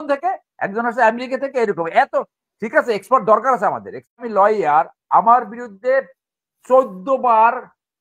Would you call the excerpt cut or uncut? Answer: cut